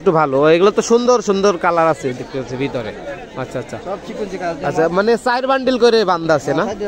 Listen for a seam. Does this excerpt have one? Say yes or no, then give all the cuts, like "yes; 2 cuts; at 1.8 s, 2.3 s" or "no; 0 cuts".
no; 0 cuts